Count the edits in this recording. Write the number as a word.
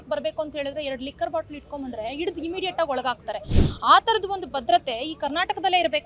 zero